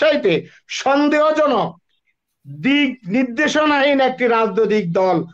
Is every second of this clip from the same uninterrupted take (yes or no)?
yes